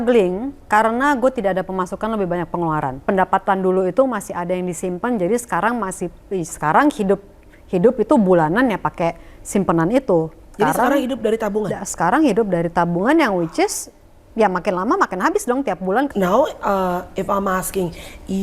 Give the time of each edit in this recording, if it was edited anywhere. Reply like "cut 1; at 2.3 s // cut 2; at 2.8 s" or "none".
cut 1; at 3.1 s // cut 2; at 10.5 s // cut 3; at 16.1 s